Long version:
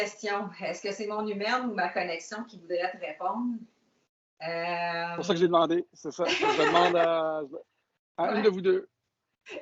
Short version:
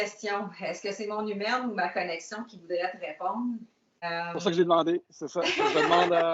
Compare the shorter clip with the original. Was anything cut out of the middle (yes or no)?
yes